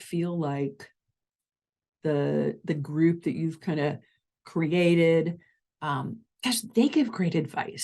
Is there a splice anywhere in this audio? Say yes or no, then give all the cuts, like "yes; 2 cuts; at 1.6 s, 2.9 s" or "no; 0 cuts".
no; 0 cuts